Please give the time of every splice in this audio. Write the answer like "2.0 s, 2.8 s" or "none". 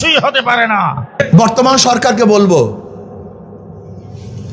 1.1 s